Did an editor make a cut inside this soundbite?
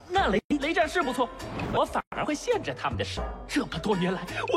no; 0 cuts

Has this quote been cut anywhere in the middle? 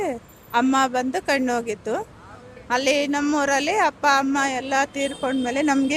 no; 0 cuts

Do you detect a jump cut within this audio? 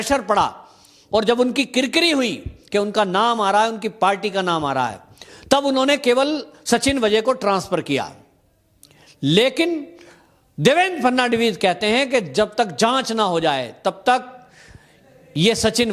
no; 0 cuts

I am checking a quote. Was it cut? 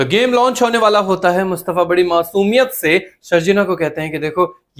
no; 0 cuts

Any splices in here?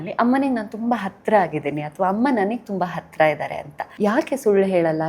yes; 1 cut; at 3.8 s

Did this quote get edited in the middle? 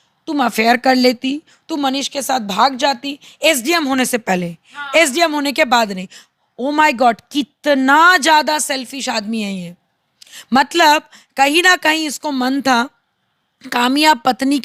no; 0 cuts

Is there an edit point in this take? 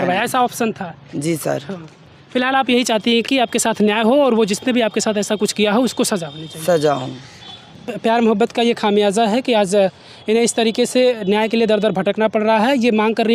no; 0 cuts

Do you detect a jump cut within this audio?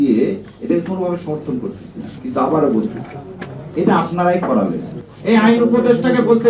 yes; 1 cut; at 5.0 s

